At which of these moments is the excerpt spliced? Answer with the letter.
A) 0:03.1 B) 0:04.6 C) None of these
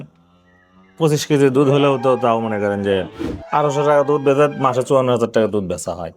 A